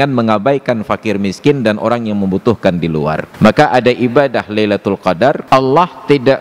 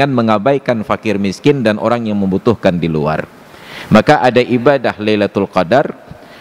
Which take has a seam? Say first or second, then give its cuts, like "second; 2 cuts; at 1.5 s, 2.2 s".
first; 2 cuts; at 3.3 s, 5.4 s